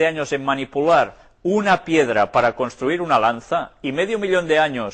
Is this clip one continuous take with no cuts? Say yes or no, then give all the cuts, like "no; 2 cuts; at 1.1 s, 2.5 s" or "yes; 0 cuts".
yes; 0 cuts